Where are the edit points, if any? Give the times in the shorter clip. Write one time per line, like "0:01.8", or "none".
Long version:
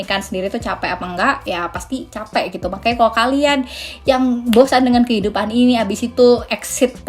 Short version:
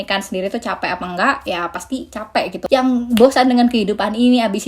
0:02.6